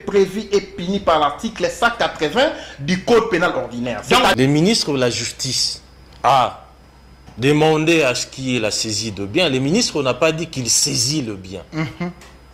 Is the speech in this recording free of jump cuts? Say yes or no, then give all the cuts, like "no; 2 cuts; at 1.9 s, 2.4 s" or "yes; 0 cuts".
no; 1 cut; at 4.3 s